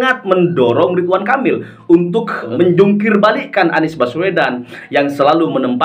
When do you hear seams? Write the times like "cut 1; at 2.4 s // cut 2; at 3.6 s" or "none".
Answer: cut 1; at 2.5 s